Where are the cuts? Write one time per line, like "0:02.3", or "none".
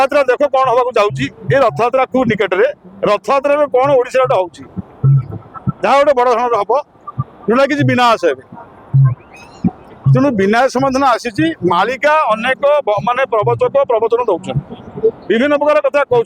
none